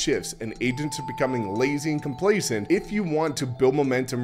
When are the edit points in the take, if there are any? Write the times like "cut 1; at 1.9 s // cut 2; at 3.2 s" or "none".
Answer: cut 1; at 2.6 s